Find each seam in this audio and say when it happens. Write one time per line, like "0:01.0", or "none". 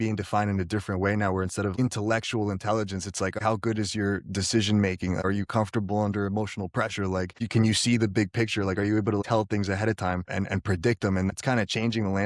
0:01.7
0:03.4
0:10.3
0:11.3